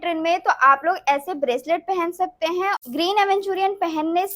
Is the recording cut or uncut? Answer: cut